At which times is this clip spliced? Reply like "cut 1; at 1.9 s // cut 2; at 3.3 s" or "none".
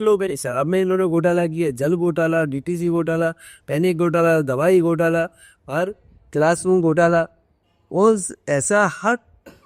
none